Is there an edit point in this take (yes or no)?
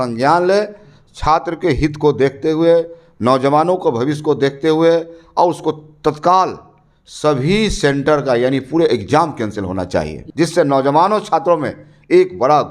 yes